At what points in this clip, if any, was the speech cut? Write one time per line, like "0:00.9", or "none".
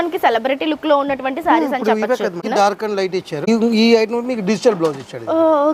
0:02.4
0:03.4